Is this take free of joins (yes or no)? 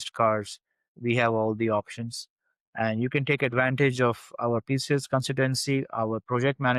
yes